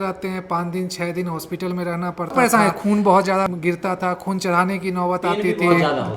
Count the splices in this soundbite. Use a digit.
1